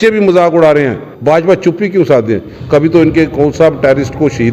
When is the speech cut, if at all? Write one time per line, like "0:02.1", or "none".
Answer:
0:01.1